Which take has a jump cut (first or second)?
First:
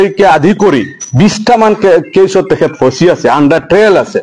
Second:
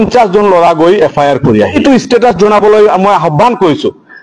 second